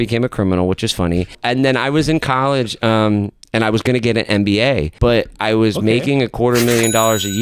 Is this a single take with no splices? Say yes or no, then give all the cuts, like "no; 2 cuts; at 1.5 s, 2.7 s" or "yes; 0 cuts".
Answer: no; 2 cuts; at 1.4 s, 4.9 s